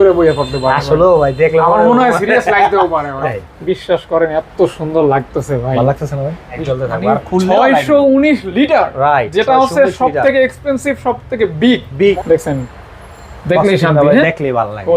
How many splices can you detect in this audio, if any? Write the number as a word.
three